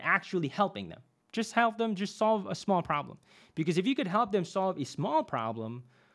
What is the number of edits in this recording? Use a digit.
1